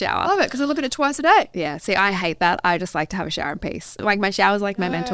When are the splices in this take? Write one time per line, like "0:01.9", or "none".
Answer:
0:04.0